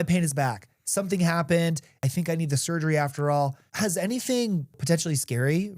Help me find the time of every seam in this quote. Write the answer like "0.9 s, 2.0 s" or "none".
2.0 s, 3.6 s, 4.8 s